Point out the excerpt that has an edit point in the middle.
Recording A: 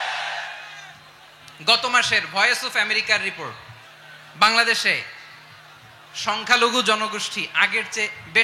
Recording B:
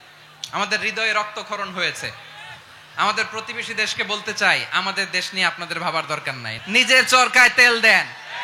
B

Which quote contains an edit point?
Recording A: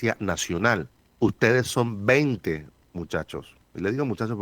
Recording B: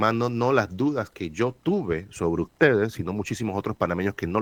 A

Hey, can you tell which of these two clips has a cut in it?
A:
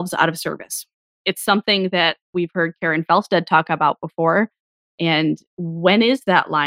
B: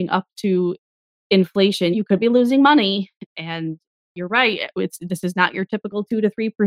B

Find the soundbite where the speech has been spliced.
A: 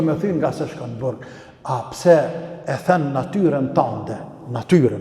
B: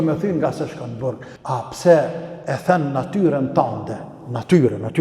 B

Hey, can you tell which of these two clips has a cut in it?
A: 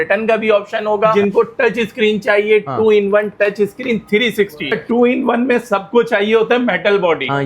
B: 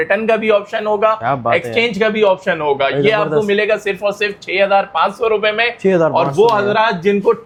A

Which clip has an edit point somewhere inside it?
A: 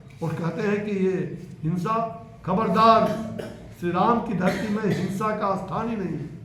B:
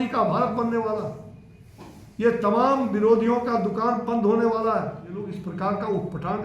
B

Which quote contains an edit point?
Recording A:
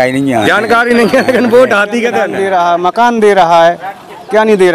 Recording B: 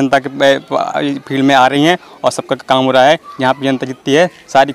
A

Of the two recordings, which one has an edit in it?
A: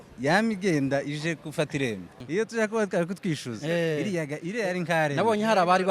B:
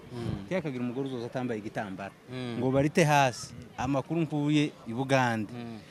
A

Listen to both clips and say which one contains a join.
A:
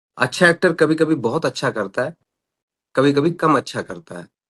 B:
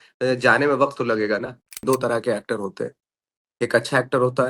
B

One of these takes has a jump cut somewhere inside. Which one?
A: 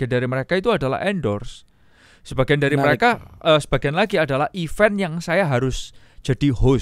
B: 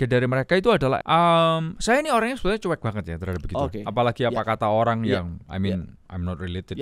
B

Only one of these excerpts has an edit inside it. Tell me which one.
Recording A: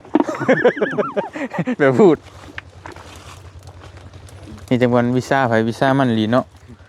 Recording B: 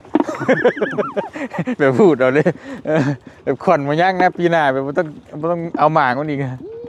A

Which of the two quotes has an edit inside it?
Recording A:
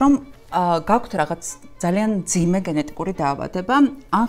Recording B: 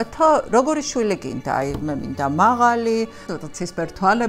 B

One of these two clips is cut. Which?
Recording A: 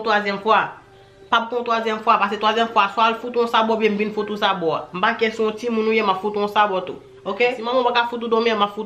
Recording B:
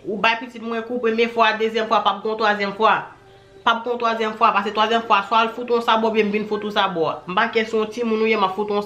A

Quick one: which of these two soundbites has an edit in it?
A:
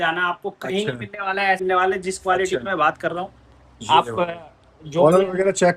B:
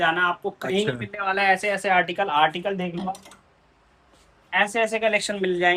A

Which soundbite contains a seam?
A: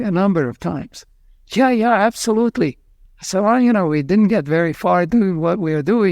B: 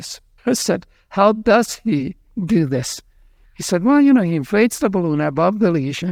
A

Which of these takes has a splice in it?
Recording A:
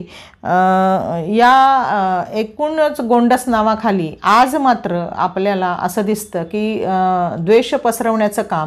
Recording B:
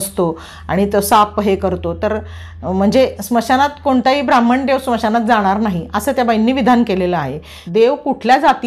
B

